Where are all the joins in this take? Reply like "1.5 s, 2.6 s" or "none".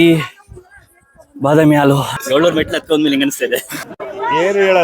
2.1 s